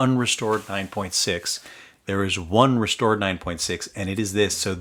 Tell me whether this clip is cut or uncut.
uncut